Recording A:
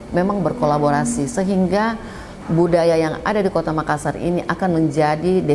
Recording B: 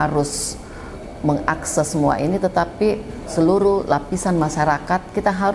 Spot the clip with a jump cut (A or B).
B